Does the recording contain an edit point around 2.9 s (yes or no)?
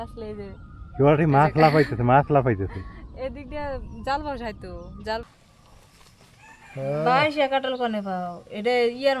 no